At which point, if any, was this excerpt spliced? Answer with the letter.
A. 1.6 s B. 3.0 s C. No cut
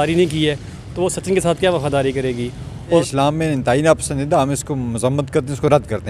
B